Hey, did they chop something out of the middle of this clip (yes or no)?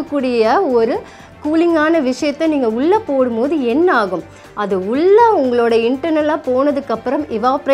no